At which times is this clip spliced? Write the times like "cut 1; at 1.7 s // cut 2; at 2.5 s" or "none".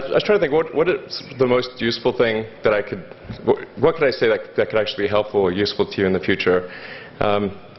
cut 1; at 1.7 s